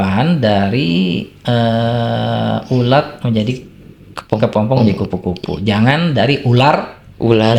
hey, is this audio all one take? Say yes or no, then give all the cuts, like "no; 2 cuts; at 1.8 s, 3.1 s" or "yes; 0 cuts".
yes; 0 cuts